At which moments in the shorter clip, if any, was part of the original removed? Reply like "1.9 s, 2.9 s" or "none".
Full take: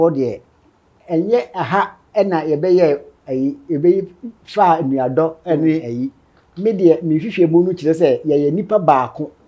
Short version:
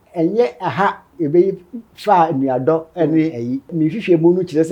1.1 s, 3.7 s